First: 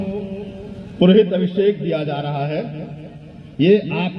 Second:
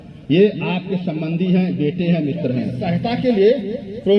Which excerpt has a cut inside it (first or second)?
second